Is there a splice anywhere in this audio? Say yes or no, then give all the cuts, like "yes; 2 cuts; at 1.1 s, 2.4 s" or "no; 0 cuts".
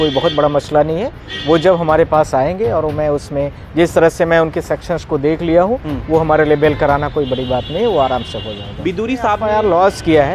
yes; 1 cut; at 9.4 s